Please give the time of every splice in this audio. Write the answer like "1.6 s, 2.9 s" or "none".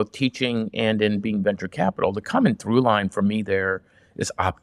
none

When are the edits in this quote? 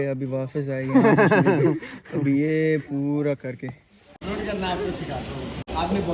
4.2 s

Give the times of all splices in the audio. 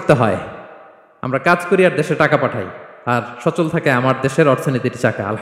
none

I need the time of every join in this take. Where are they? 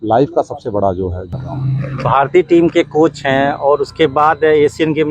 1.3 s

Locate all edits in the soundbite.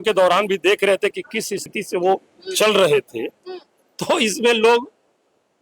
1.7 s

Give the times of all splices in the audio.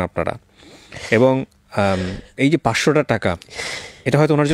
none

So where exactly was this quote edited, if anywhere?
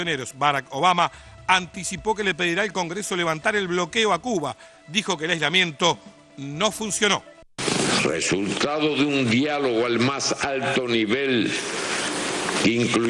7.4 s

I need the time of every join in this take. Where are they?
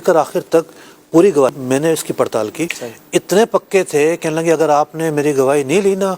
1.5 s, 2.8 s

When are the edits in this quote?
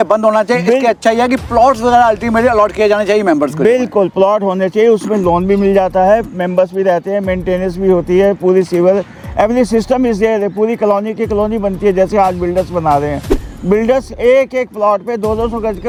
none

